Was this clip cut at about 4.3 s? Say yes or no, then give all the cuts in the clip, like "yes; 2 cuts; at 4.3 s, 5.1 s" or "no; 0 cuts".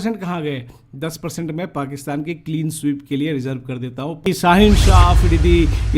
yes; 1 cut; at 4.3 s